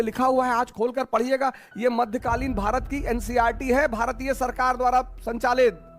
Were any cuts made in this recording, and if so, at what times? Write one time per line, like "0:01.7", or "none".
none